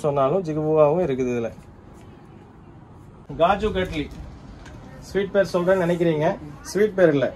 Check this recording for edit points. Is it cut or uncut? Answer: cut